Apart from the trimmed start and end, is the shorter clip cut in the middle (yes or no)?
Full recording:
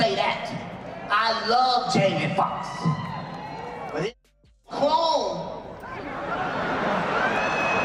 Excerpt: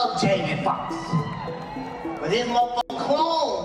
no